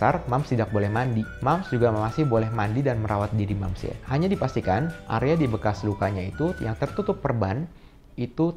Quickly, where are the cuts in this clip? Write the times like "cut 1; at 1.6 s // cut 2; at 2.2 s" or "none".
none